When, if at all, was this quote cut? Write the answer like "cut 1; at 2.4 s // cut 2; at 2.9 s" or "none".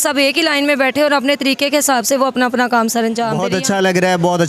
cut 1; at 3.4 s